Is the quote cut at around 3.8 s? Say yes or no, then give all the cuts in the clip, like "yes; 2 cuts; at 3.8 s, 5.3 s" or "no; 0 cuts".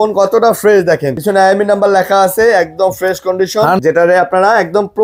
yes; 2 cuts; at 1.1 s, 3.8 s